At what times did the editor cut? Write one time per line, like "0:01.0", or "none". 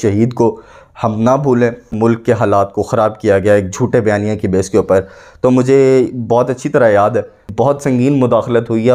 0:01.9
0:07.5